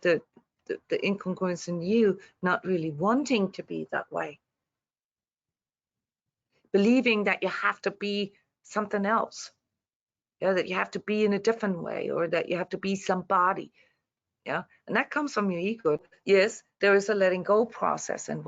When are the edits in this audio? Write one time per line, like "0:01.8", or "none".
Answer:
0:16.0